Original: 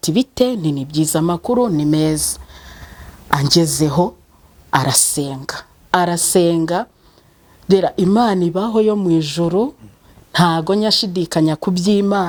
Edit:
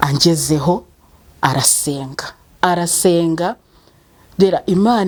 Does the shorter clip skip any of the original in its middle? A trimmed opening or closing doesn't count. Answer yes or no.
no